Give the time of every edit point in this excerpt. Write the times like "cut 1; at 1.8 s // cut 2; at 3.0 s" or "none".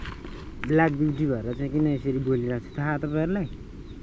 none